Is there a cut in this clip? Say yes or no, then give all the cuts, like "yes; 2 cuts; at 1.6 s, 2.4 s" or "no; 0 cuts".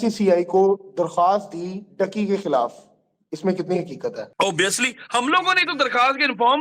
yes; 1 cut; at 4.3 s